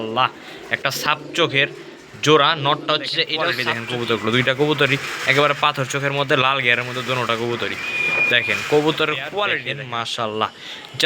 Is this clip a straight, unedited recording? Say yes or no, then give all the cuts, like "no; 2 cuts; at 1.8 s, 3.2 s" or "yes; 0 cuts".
no; 2 cuts; at 3.7 s, 9.7 s